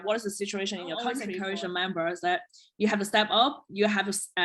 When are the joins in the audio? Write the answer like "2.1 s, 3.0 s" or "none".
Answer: 1.3 s